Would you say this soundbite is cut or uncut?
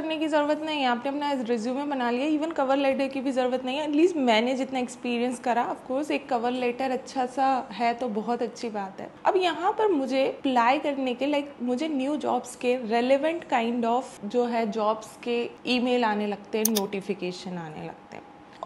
uncut